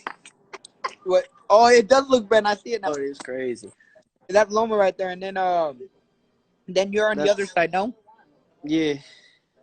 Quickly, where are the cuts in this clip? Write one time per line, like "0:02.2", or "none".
0:04.3

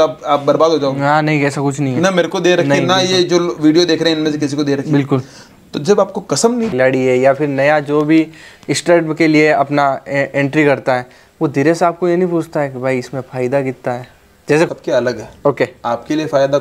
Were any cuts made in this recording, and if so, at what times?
0:06.7
0:14.7

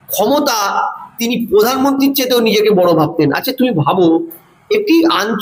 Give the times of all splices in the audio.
none

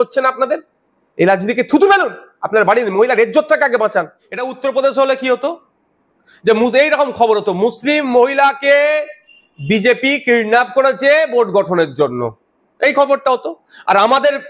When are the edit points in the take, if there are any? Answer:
0:04.5

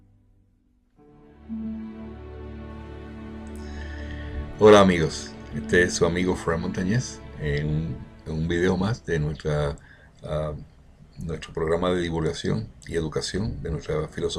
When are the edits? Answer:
none

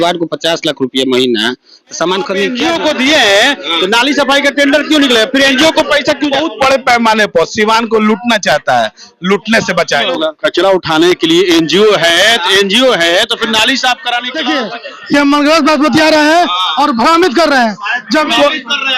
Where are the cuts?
0:02.6
0:06.4
0:10.1
0:14.3

